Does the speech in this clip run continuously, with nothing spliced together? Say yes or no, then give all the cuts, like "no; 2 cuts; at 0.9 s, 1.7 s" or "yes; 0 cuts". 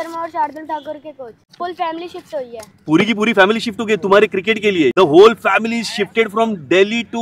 no; 2 cuts; at 1.4 s, 4.9 s